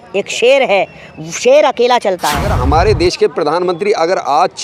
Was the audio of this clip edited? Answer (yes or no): yes